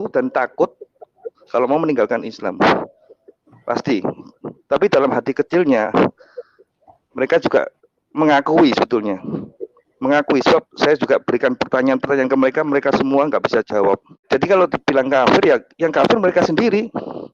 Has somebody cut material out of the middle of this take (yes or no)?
yes